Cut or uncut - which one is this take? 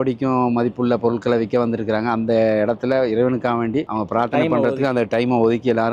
uncut